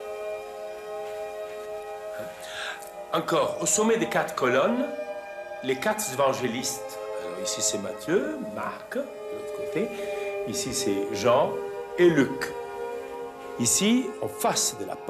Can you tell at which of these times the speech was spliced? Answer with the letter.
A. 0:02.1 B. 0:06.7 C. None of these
A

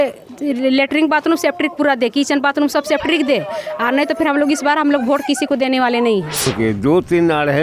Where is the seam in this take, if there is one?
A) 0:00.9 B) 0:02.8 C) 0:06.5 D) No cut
C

